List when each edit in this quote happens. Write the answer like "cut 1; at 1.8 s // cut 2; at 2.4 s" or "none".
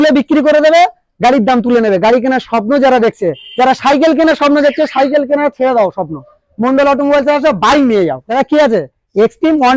cut 1; at 8.2 s